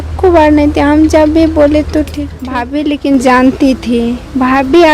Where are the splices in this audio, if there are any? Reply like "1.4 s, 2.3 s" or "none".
2.6 s